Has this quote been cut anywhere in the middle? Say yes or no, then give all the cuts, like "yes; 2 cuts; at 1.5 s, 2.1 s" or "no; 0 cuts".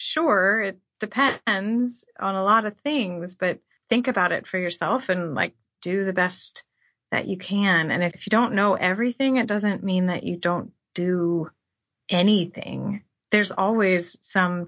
yes; 3 cuts; at 3.7 s, 5.8 s, 8.1 s